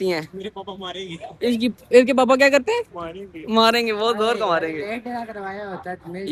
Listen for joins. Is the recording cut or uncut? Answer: uncut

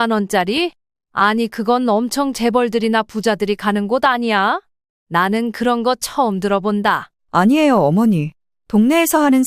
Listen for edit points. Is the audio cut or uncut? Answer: cut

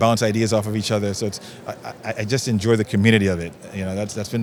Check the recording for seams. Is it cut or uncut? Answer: uncut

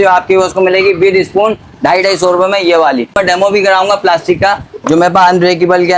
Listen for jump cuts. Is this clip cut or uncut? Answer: cut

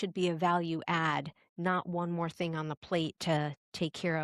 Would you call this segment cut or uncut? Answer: uncut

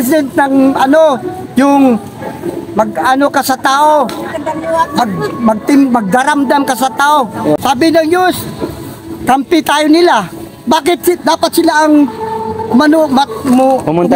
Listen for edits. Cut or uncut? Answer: cut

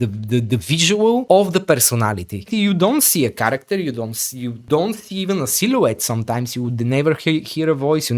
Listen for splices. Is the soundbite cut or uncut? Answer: cut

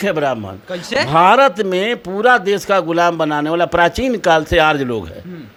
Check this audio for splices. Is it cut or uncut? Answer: uncut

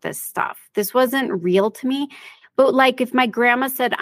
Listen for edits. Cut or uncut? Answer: uncut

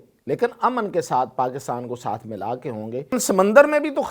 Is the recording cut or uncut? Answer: cut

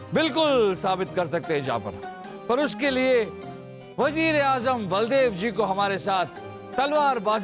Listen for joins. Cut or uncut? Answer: uncut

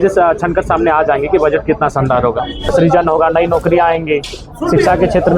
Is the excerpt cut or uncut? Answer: cut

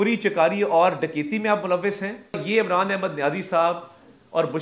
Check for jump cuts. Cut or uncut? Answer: cut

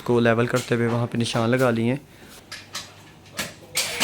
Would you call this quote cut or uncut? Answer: cut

